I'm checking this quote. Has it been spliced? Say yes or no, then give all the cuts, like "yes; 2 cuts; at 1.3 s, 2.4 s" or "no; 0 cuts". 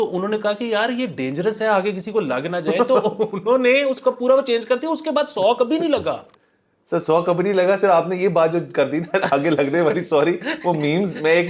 no; 0 cuts